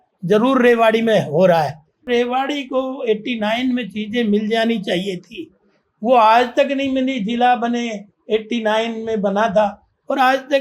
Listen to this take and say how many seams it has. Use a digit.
1